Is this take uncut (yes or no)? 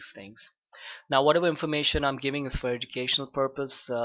no